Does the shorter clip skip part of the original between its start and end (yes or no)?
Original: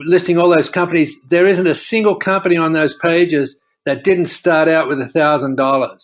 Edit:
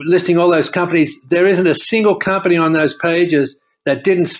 no